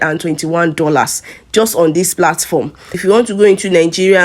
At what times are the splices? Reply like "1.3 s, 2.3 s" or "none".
2.9 s